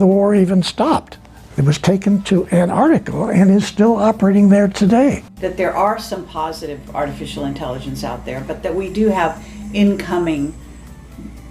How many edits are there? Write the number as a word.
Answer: one